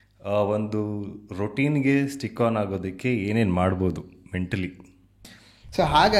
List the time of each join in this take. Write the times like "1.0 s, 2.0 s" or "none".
5.3 s